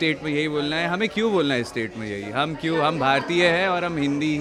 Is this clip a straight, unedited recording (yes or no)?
yes